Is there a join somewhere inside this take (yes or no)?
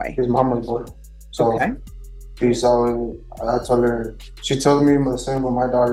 no